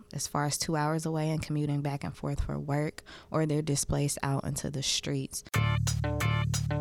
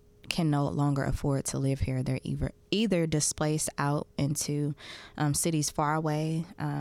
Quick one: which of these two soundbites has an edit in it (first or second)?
first